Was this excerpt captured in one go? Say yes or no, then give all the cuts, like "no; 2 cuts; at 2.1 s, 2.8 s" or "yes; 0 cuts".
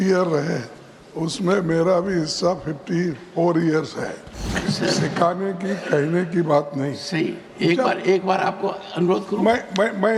no; 1 cut; at 4.5 s